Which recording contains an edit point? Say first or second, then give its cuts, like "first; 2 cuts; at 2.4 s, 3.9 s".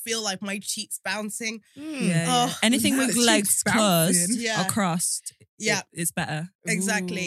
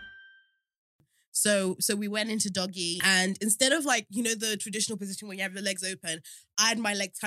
second; 2 cuts; at 0.9 s, 2.9 s